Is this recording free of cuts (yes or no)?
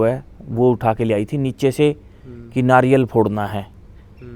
yes